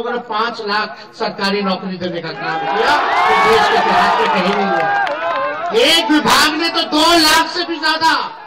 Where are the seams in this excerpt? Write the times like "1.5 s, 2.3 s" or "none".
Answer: none